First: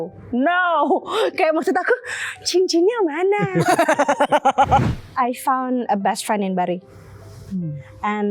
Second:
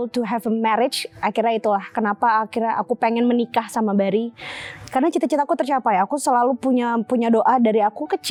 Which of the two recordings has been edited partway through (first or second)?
first